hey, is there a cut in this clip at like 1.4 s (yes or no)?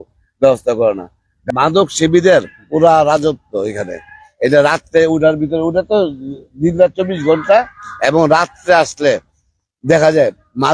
yes